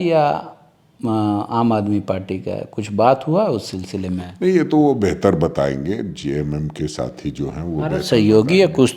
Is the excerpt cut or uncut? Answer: uncut